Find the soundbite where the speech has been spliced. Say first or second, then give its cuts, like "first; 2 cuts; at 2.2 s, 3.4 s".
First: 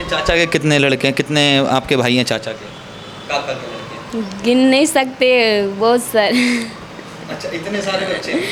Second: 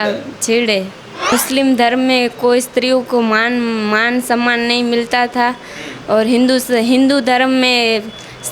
second; 1 cut; at 1.3 s